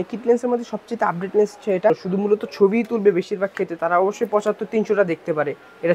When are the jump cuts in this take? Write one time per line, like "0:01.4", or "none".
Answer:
0:01.9